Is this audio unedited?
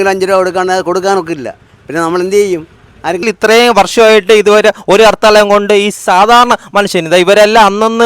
no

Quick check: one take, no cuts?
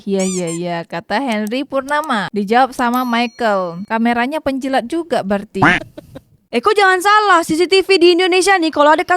no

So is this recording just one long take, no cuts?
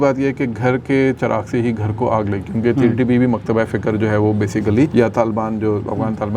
no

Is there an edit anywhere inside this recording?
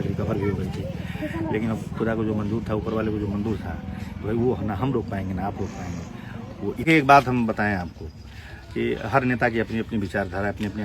yes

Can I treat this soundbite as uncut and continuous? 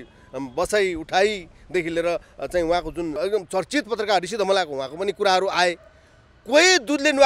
no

